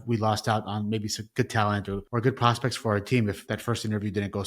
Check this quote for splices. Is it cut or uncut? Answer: cut